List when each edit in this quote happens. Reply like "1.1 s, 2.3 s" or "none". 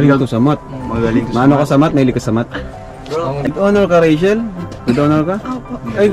3.5 s